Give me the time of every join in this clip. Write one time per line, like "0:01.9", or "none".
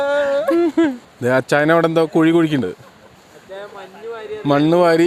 0:01.1

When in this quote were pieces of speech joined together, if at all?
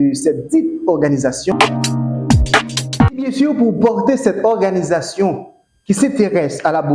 0:01.5
0:03.2

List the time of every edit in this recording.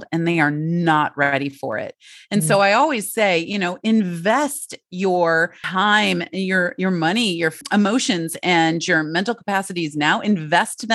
0:05.6
0:07.6

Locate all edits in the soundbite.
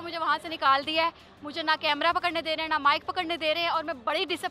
none

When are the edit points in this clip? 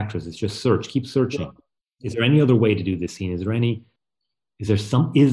0:03.9

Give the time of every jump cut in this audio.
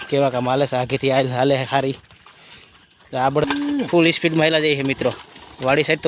0:03.4

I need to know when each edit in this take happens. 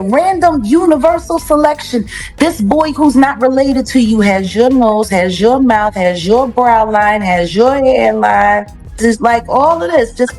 0:09.0

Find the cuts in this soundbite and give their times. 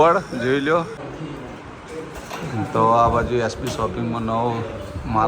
0:01.0

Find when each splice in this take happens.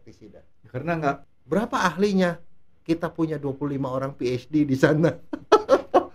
0:01.3

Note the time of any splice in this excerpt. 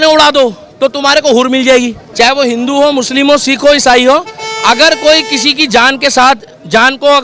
0:02.0

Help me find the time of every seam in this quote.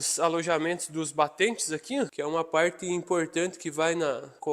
0:02.1

